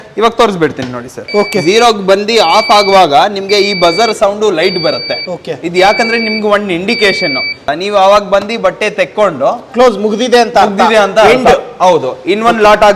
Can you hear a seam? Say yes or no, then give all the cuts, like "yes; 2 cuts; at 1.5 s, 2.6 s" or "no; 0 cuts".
yes; 2 cuts; at 1.2 s, 7.6 s